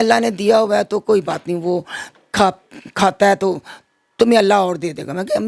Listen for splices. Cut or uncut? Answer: uncut